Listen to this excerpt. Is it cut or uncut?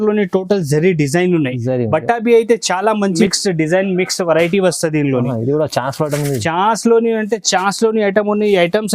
cut